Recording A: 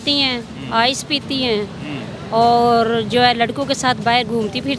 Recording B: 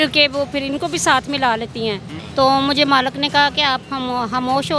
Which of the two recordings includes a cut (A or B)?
B